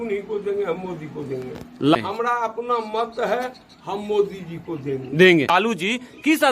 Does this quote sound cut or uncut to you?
cut